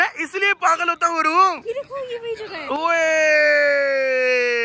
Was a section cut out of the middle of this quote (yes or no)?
no